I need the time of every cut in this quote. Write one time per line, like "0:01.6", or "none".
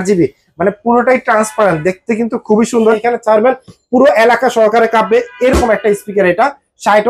0:03.0